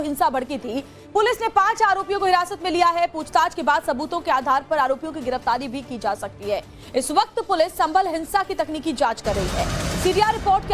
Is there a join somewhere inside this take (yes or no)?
no